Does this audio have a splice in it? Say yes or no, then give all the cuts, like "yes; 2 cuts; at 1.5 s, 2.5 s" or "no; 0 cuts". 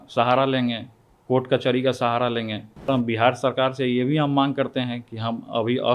yes; 1 cut; at 2.9 s